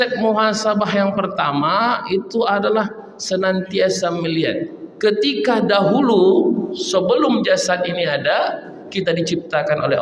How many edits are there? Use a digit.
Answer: 1